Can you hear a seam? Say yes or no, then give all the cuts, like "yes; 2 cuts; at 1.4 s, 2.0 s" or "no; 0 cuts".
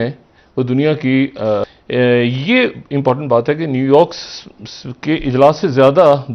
no; 0 cuts